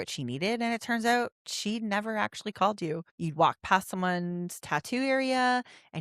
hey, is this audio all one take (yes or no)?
no